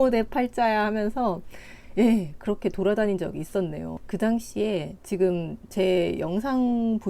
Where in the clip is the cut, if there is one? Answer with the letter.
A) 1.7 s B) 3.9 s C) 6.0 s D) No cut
B